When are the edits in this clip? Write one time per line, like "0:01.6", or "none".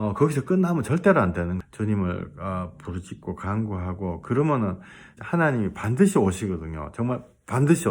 0:01.6
0:05.2